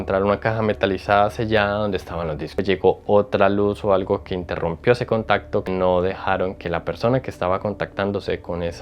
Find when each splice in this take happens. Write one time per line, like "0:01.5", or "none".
0:02.5
0:05.7